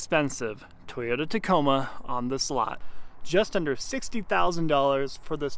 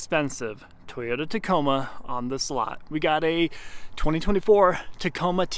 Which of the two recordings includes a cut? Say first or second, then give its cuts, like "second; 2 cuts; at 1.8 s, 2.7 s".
first; 1 cut; at 2.8 s